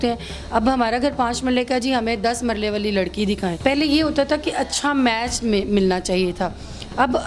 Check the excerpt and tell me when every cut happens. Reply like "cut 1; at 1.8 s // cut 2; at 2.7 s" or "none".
cut 1; at 3.6 s